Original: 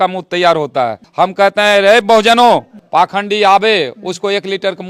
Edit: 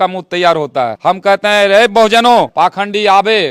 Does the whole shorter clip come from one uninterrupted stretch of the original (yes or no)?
no